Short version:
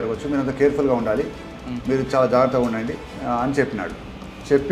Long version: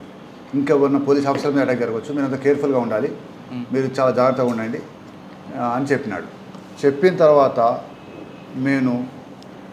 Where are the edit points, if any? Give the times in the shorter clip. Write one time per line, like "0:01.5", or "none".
0:03.1